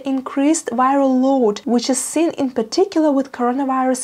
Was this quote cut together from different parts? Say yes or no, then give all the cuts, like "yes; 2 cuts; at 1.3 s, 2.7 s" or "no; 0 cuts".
yes; 1 cut; at 1.6 s